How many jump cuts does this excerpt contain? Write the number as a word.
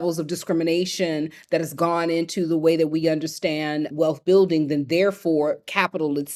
zero